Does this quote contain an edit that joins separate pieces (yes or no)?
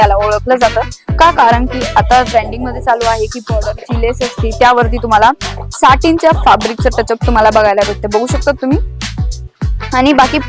no